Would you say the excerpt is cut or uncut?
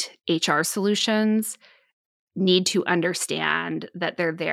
uncut